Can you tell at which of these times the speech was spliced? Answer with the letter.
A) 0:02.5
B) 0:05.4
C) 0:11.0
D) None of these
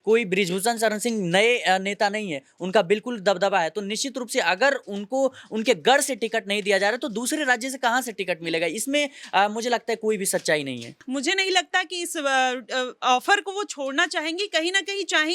C